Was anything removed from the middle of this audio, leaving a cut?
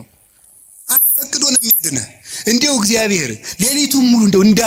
no; 0 cuts

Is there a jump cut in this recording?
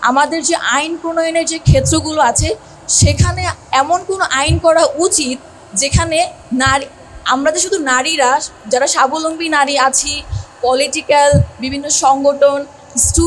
yes; 2 cuts; at 3.6 s, 6.4 s

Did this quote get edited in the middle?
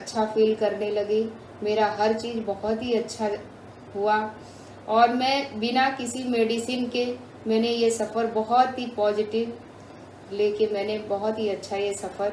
no; 0 cuts

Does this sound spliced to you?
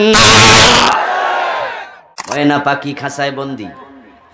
yes; 1 cut; at 2.3 s

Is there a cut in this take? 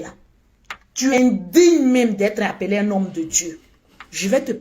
yes; 1 cut; at 1.1 s

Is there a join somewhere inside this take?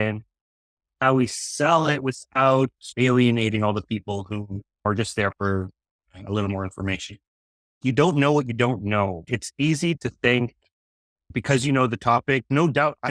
yes; 1 cut; at 7.8 s

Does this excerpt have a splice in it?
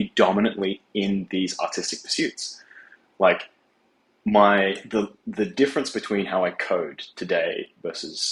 no; 0 cuts

